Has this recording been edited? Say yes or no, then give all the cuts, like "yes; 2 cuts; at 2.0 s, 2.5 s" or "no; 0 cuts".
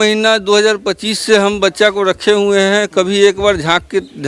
no; 0 cuts